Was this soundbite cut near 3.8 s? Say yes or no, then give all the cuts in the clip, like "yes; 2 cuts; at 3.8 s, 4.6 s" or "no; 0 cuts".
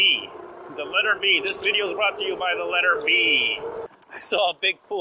yes; 1 cut; at 3.8 s